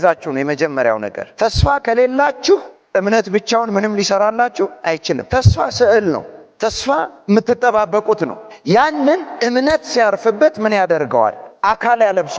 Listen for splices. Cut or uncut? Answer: uncut